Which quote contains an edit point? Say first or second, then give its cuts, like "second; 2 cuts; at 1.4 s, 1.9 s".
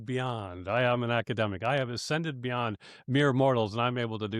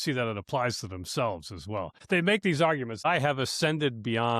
second; 2 cuts; at 2.0 s, 3.0 s